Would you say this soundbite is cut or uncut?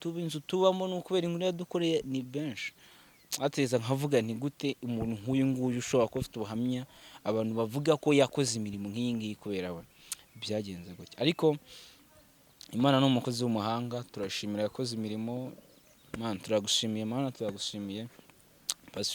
uncut